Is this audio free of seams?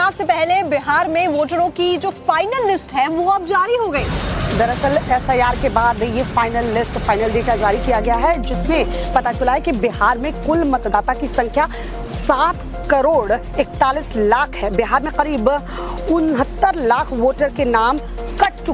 no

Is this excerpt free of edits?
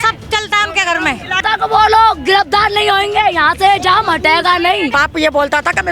no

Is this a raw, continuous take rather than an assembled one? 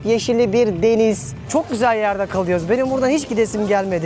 no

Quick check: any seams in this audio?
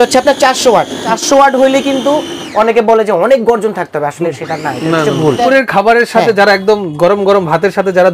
yes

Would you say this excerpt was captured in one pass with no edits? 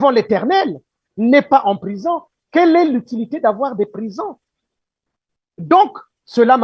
yes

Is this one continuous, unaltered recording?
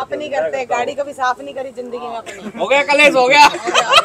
yes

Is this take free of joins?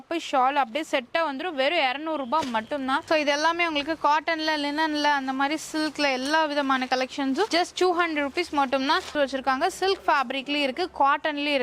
no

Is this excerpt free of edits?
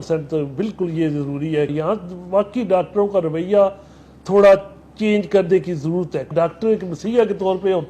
no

